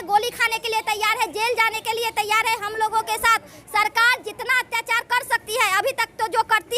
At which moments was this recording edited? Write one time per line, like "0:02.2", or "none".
none